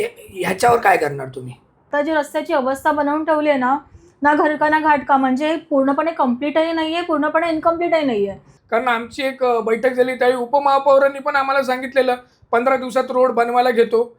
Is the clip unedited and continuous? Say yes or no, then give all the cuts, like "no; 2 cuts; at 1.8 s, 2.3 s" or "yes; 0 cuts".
no; 2 cuts; at 1.9 s, 8.5 s